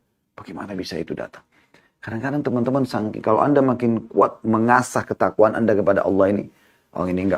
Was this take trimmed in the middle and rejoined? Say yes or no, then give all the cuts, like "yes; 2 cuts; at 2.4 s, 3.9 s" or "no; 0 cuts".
no; 0 cuts